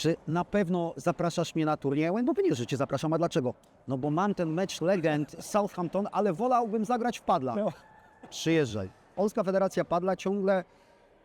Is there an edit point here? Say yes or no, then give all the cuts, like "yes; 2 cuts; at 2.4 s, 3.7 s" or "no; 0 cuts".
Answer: yes; 1 cut; at 9.1 s